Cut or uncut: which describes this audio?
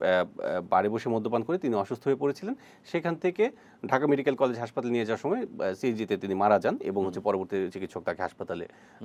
uncut